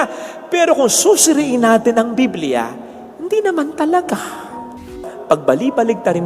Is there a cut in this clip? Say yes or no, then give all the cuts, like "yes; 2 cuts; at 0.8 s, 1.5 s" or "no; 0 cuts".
yes; 1 cut; at 4.9 s